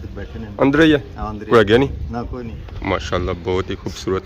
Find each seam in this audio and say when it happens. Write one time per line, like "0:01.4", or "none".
0:02.7